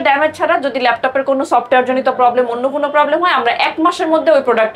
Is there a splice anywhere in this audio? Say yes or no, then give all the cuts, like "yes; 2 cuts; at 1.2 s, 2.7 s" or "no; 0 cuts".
no; 0 cuts